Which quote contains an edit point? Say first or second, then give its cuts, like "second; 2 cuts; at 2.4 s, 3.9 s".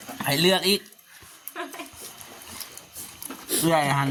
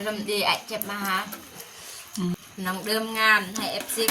second; 1 cut; at 2.4 s